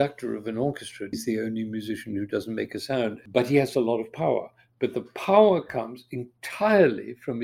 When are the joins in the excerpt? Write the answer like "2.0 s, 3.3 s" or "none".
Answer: 1.1 s, 3.2 s